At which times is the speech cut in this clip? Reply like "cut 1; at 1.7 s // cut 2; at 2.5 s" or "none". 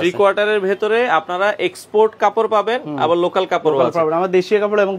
none